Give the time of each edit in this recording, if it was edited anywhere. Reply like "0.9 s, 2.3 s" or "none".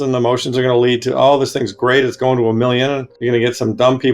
3.1 s